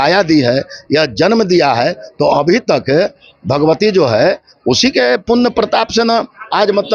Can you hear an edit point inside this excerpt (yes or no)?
no